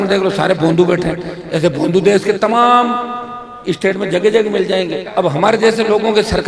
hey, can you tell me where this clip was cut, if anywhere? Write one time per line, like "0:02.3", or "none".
0:05.0